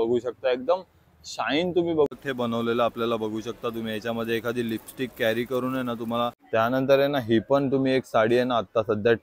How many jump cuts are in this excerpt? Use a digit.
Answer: 2